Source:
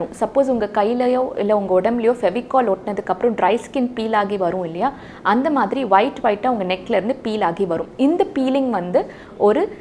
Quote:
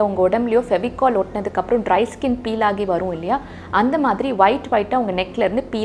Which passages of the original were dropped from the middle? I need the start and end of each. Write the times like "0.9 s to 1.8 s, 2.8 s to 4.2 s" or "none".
none